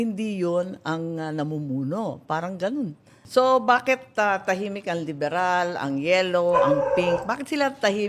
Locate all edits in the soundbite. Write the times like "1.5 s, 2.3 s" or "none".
3.2 s